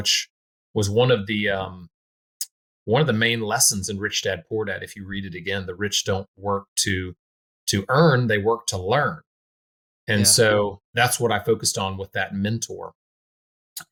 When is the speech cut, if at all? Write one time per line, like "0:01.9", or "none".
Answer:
none